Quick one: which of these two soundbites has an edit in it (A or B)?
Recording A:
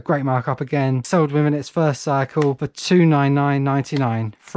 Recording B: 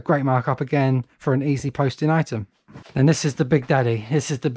A